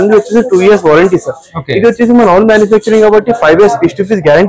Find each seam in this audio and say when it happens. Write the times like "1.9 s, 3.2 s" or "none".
none